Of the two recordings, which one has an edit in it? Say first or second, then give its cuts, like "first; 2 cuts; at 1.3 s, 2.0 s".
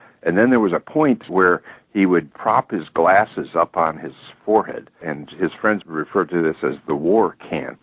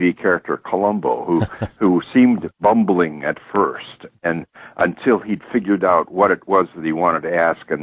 first; 3 cuts; at 1.3 s, 2.3 s, 5.9 s